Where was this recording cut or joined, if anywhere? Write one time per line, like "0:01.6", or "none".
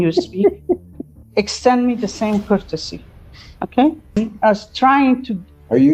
0:04.2